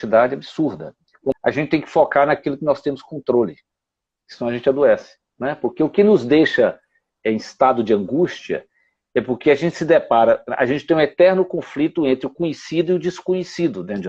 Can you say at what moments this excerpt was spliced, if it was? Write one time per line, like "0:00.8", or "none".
0:01.4